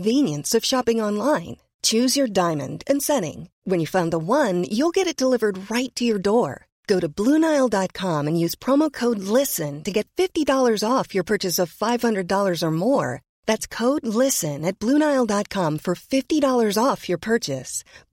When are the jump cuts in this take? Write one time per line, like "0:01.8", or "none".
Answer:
none